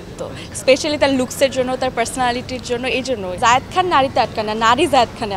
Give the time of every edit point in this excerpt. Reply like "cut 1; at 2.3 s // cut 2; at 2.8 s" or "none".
cut 1; at 3.3 s